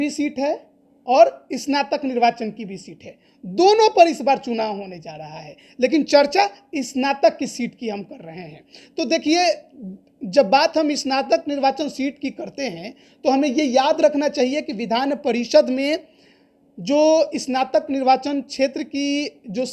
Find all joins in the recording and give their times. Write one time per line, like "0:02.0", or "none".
none